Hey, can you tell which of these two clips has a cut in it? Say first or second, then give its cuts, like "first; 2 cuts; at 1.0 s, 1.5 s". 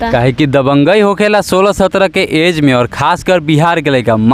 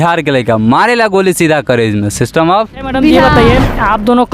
second; 1 cut; at 3.2 s